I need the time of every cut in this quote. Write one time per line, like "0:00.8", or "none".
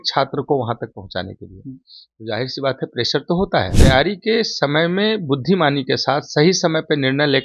0:03.7